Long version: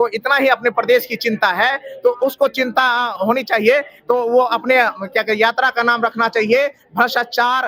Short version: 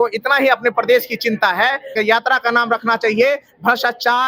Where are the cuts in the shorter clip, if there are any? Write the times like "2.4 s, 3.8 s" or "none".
1.9 s